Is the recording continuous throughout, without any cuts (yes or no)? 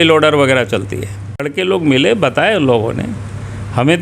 no